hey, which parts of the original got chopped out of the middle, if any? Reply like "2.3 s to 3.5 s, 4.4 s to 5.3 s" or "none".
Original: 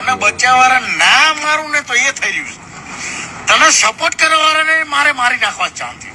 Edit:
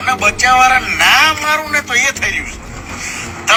none